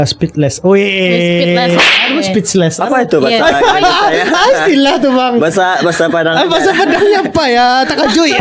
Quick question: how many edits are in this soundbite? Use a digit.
0